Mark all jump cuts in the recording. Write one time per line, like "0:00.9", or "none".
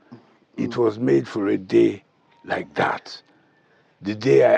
none